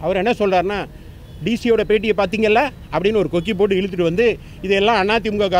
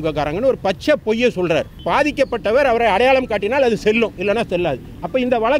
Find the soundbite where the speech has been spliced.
second; 1 cut; at 1.8 s

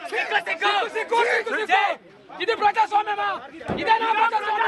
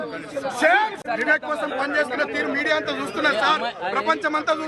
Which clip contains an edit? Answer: second; 1 cut; at 1.0 s

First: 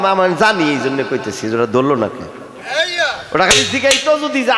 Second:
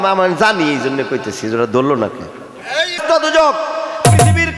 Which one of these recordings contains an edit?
second; 1 cut; at 3.0 s

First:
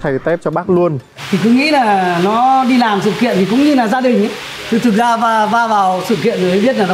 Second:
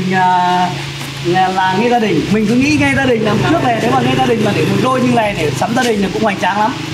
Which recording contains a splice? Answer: first; 1 cut; at 1.1 s

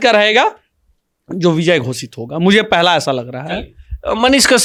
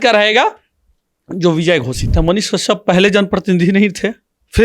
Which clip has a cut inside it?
second; 1 cut; at 2.1 s

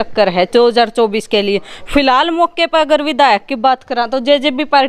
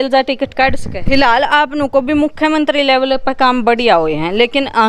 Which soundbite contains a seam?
second; 1 cut; at 1.0 s

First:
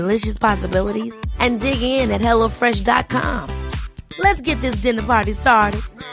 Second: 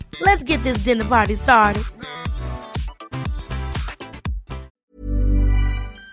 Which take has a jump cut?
second; 1 cut; at 4.8 s

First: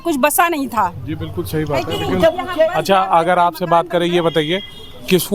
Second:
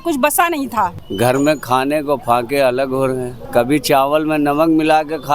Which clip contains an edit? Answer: second; 2 cuts; at 1.0 s, 3.3 s

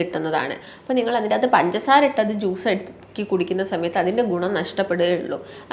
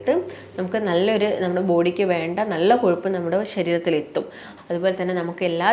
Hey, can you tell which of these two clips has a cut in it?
second; 1 cut; at 4.5 s

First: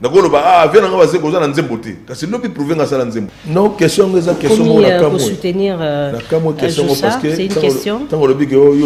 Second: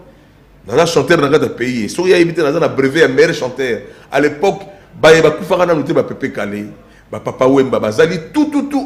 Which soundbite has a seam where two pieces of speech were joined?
first; 1 cut; at 3.4 s

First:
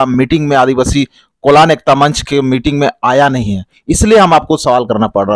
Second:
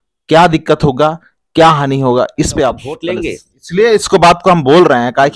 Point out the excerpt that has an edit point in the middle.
second; 1 cut; at 3.1 s

